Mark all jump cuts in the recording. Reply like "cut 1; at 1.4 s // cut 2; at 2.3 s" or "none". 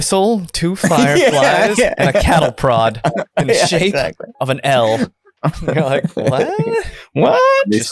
none